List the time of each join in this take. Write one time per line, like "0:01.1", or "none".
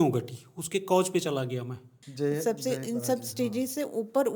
0:02.0